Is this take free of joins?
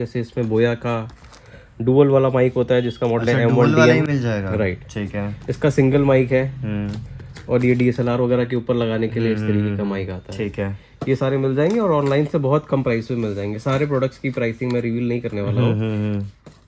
yes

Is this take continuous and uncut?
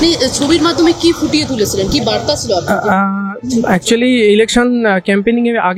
yes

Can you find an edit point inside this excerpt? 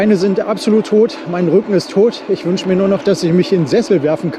no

